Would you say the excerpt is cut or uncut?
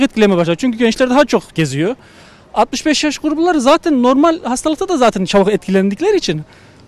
uncut